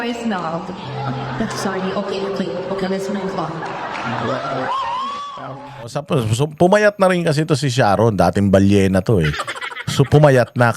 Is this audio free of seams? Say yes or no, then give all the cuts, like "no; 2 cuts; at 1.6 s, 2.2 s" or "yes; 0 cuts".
yes; 0 cuts